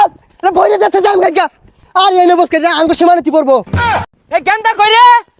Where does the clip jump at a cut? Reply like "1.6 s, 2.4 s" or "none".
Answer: 4.0 s